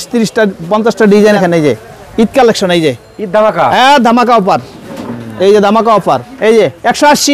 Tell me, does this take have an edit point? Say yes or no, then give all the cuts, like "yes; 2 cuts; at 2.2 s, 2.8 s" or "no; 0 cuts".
yes; 2 cuts; at 1.4 s, 6.3 s